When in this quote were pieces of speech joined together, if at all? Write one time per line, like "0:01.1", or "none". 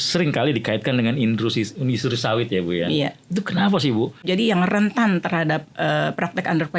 0:04.2